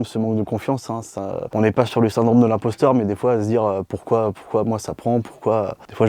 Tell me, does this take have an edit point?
no; 0 cuts

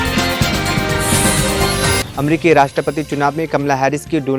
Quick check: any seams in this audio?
yes; 1 cut; at 2.0 s

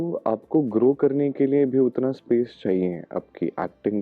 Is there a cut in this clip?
no; 0 cuts

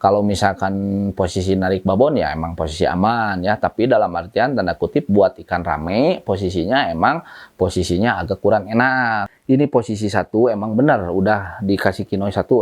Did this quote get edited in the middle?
yes; 1 cut; at 9.3 s

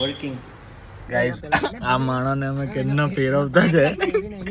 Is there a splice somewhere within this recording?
yes; 1 cut; at 1.0 s

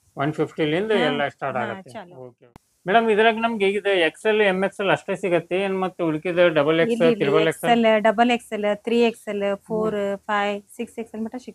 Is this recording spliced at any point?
yes; 1 cut; at 2.7 s

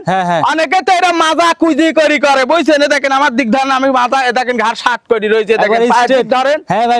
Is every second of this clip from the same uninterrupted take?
yes; 0 cuts

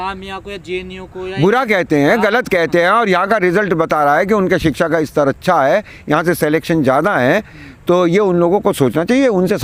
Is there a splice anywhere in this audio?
no; 0 cuts

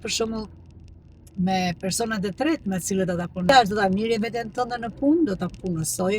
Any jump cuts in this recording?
yes; 1 cut; at 3.5 s

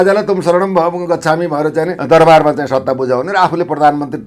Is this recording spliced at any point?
yes; 1 cut; at 2.0 s

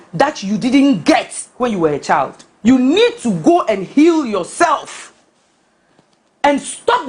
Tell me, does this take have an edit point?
yes; 1 cut; at 2.4 s

